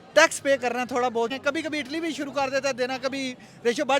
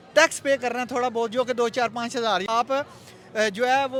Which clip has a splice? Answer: first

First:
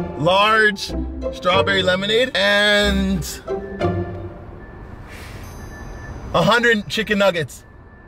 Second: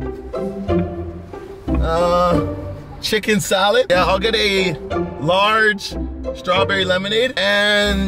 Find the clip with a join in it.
second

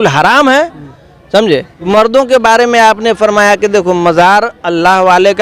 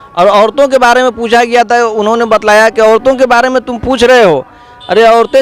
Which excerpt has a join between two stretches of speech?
first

